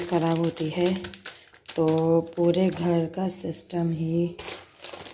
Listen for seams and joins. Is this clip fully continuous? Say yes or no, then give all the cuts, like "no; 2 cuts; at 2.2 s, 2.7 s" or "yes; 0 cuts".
yes; 0 cuts